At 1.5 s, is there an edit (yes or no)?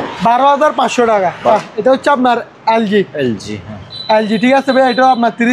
yes